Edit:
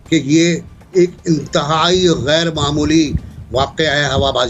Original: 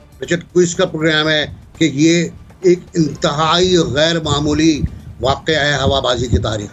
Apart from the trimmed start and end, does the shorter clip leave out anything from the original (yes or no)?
no